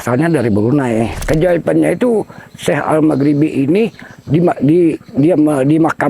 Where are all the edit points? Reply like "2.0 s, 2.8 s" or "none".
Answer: 1.2 s